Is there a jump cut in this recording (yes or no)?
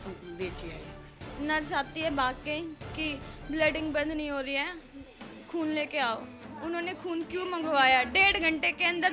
yes